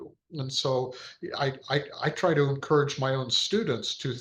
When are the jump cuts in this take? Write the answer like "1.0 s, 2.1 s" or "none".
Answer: none